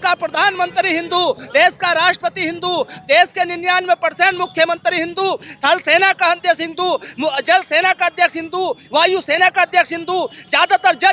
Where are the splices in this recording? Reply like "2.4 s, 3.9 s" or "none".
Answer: none